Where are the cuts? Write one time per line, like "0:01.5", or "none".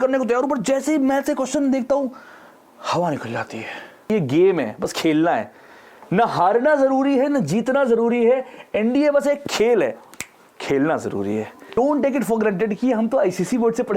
0:04.1
0:11.7